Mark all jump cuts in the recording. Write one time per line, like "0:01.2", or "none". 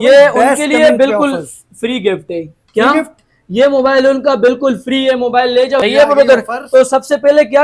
0:05.8